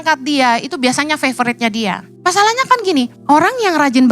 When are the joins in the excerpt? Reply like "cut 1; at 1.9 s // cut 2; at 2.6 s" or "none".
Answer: cut 1; at 2.1 s // cut 2; at 3.2 s